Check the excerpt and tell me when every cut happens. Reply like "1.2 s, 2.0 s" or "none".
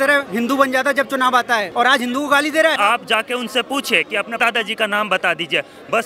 1.7 s, 2.8 s